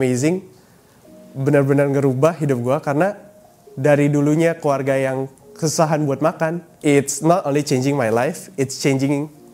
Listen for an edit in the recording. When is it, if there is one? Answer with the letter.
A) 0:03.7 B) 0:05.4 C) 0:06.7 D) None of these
C